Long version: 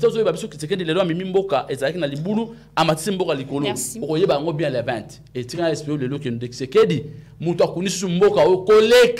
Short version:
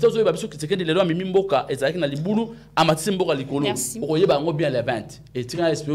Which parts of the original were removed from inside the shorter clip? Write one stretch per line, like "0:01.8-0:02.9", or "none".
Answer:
none